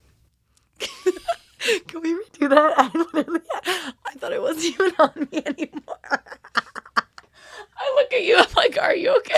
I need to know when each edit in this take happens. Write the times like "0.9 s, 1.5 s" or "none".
none